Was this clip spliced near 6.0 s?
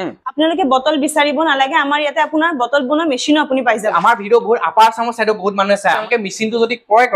yes; 2 cuts; at 3.8 s, 6.0 s

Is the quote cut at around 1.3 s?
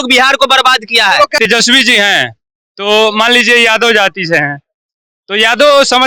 yes; 1 cut; at 1.3 s

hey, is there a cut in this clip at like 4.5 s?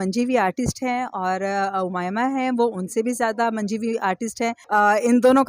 yes; 1 cut; at 4.5 s

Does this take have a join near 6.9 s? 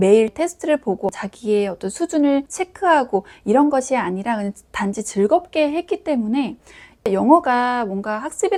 no; 0 cuts

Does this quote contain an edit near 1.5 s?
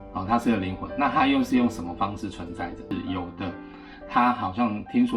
no; 1 cut; at 2.9 s

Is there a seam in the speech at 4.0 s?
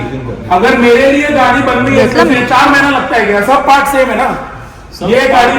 no; 1 cut; at 2.4 s

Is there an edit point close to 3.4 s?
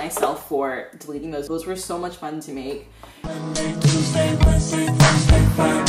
yes; 2 cuts; at 1.5 s, 3.4 s

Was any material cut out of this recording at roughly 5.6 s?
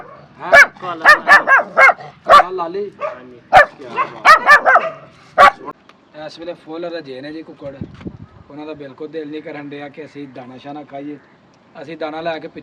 yes; 1 cut; at 5.6 s

